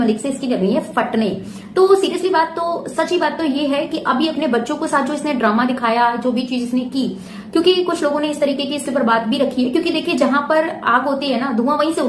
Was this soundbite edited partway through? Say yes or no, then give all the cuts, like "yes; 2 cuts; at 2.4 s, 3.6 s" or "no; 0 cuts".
no; 0 cuts